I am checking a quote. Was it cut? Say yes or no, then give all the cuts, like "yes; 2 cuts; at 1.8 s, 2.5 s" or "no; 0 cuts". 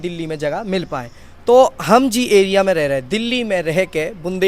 yes; 1 cut; at 1.2 s